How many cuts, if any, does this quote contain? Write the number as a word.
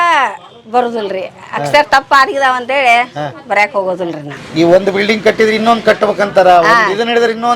one